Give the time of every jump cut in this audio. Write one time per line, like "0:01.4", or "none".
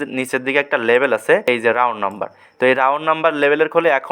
0:01.5